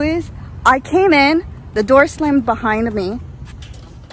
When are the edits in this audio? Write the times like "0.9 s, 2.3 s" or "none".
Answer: none